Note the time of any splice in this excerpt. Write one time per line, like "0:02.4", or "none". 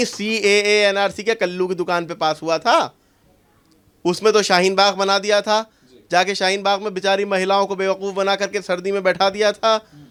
none